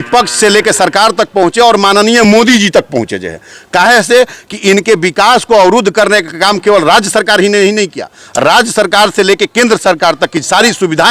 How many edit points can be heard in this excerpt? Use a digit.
0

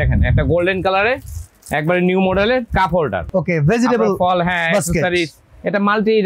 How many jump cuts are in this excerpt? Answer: 1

